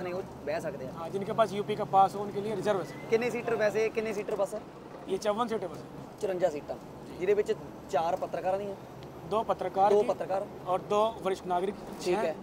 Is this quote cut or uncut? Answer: uncut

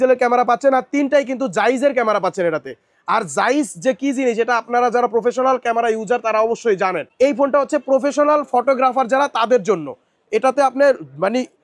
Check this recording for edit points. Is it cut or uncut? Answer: uncut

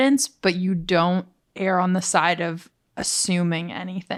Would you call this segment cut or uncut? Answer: uncut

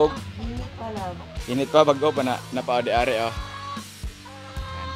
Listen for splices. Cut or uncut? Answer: uncut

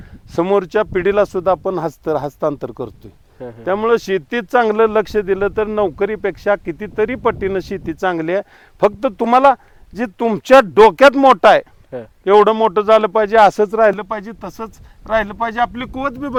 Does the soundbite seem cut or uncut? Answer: uncut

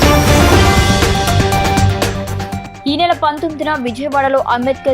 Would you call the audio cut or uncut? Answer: uncut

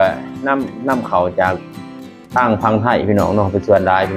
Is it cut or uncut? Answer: uncut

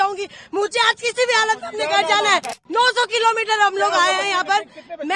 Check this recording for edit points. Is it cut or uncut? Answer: cut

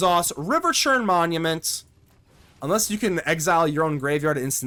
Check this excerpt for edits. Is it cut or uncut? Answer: uncut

